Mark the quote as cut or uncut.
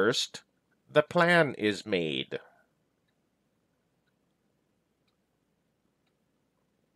uncut